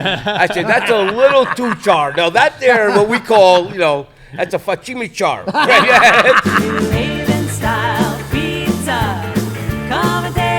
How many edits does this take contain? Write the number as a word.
one